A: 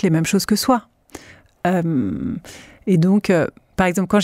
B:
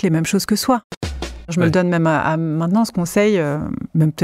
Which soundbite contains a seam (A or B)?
B